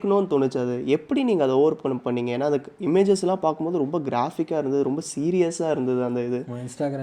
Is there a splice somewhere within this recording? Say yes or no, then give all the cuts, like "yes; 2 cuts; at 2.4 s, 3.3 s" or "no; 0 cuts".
no; 0 cuts